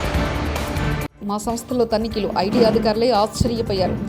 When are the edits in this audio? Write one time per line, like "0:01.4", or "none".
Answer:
none